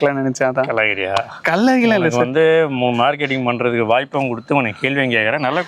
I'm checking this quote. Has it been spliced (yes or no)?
no